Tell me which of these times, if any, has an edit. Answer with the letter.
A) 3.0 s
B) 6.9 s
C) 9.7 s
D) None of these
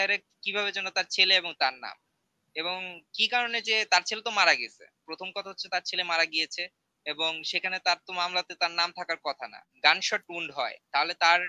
C